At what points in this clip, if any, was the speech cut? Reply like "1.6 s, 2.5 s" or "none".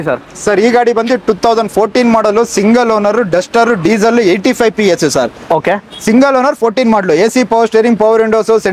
none